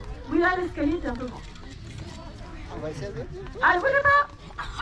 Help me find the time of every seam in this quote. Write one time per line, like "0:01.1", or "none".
none